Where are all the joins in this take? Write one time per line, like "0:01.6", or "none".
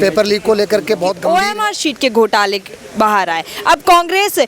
0:01.2